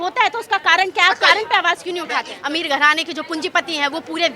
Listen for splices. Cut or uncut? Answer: cut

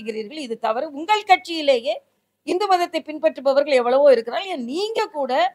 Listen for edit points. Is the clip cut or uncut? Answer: uncut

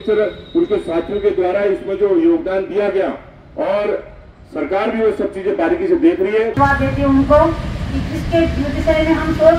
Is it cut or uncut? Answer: cut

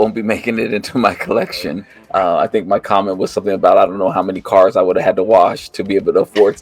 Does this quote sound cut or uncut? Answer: cut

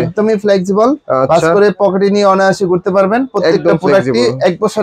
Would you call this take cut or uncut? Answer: uncut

